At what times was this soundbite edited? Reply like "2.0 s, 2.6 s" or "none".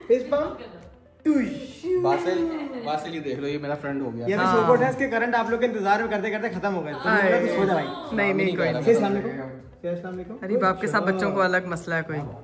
none